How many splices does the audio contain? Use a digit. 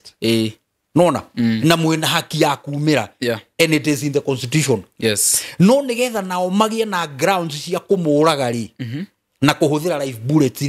0